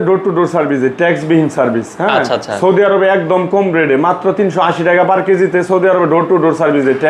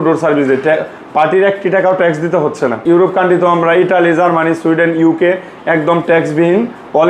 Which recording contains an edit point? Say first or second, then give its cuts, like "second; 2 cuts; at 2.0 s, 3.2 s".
second; 1 cut; at 2.8 s